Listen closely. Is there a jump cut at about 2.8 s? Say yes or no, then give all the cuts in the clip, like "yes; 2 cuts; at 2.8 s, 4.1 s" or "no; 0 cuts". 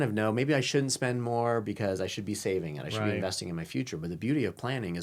no; 0 cuts